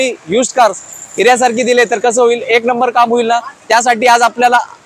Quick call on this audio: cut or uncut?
uncut